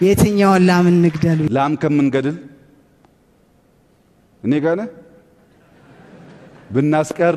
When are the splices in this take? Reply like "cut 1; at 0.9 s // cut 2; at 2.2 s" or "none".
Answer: cut 1; at 1.5 s